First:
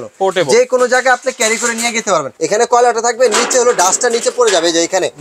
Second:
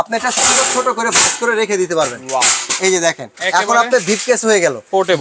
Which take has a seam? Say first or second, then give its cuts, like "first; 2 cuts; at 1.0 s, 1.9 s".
first; 1 cut; at 2.3 s